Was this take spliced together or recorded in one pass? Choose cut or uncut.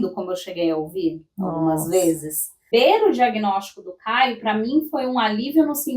cut